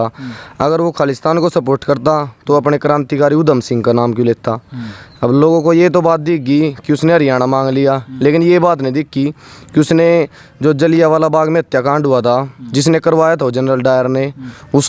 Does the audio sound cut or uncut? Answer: uncut